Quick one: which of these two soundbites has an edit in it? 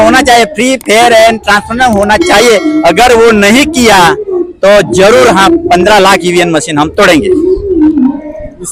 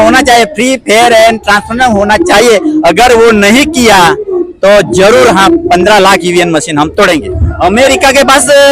second; 1 cut; at 7.3 s

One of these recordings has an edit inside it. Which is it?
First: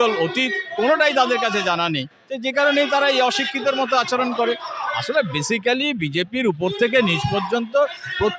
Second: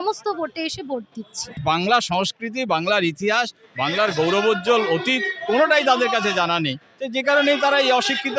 second; 1 cut; at 1.6 s

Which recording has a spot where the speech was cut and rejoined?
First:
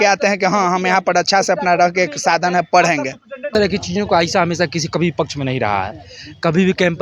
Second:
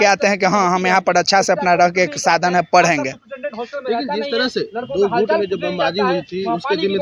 first; 1 cut; at 3.5 s

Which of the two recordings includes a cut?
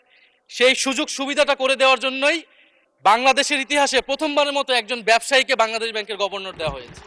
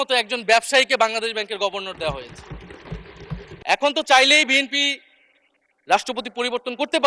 second; 1 cut; at 3.5 s

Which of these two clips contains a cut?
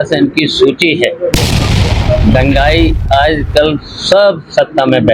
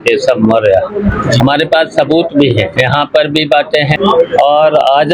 second; 3 cuts; at 1.4 s, 2.7 s, 3.9 s

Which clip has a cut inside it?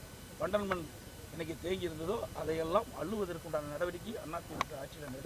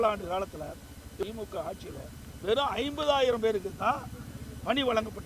second; 1 cut; at 1.2 s

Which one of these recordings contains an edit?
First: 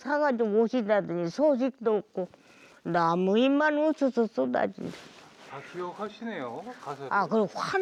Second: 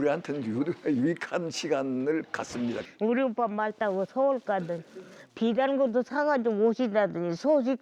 second; 1 cut; at 2.8 s

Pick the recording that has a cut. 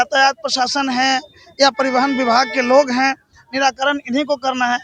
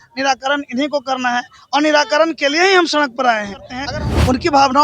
second; 1 cut; at 3.8 s

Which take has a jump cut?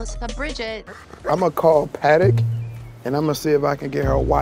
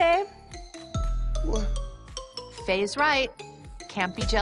first; 1 cut; at 0.9 s

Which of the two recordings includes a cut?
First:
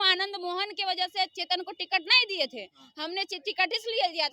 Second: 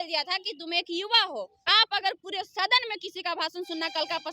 second; 1 cut; at 1.6 s

